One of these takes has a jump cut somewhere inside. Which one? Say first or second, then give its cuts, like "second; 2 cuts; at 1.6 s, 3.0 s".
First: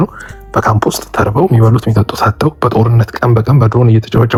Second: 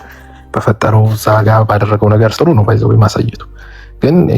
second; 1 cut; at 2.3 s